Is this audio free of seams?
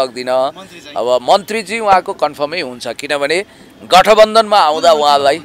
yes; 0 cuts

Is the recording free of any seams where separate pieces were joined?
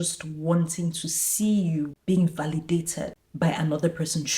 no; 2 cuts; at 2.0 s, 3.2 s

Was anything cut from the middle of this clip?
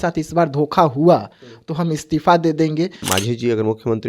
yes; 1 cut; at 3.0 s

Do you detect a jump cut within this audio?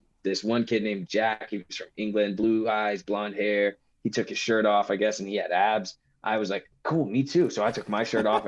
no; 0 cuts

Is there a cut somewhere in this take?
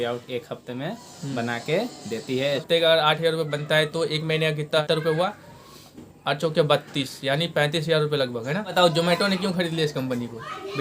yes; 3 cuts; at 2.6 s, 4.8 s, 8.7 s

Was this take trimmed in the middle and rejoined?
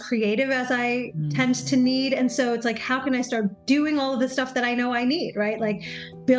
no; 0 cuts

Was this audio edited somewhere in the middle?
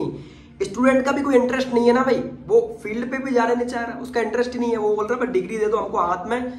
no; 0 cuts

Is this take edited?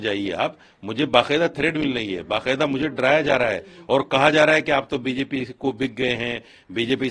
no; 0 cuts

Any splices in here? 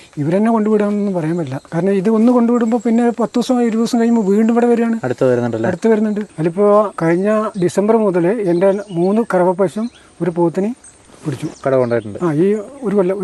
yes; 4 cuts; at 1.6 s, 6.3 s, 7.2 s, 11.5 s

